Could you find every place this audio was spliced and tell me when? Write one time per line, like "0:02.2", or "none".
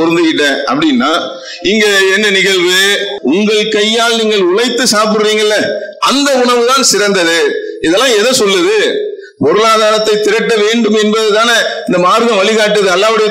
0:03.1